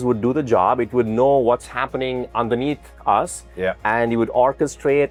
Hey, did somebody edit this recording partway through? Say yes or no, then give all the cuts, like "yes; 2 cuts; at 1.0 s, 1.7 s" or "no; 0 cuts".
no; 0 cuts